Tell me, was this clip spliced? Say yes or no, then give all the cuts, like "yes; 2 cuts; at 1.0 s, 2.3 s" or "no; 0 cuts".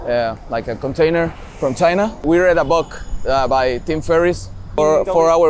yes; 2 cuts; at 2.2 s, 4.8 s